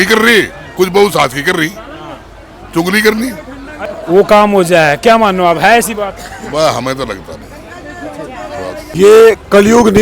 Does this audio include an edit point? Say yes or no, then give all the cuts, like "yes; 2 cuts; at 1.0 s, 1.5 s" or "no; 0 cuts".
yes; 2 cuts; at 3.9 s, 8.9 s